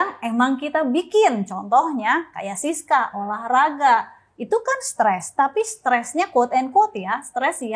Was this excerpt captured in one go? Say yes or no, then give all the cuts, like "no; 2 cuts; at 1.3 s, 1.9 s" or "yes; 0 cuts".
yes; 0 cuts